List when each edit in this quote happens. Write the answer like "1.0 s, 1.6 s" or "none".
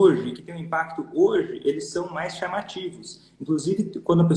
none